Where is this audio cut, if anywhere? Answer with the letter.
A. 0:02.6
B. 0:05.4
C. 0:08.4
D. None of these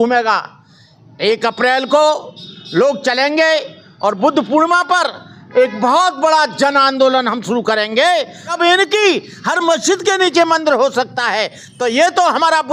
C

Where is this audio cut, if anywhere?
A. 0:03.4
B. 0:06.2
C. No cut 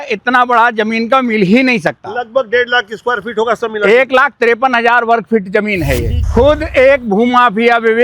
B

